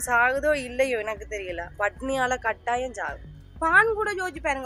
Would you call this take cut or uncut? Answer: cut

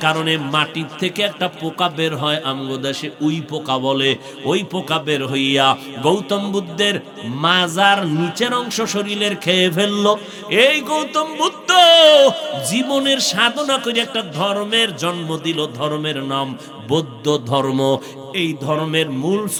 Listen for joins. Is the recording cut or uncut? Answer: uncut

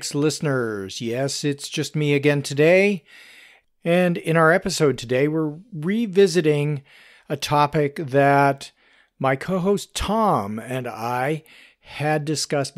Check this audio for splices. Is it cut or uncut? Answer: cut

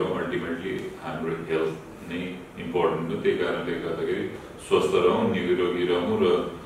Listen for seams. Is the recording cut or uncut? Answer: uncut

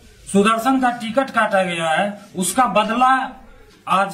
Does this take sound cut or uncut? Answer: uncut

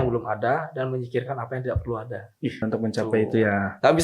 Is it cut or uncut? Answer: cut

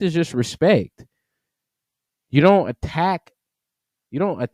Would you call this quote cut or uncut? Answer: uncut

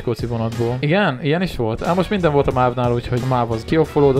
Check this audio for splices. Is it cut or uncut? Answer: cut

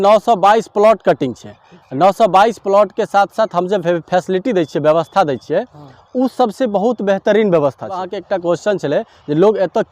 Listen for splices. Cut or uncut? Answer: cut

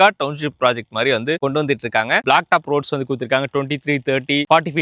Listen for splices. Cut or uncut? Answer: cut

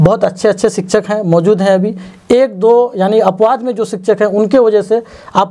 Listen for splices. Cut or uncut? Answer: uncut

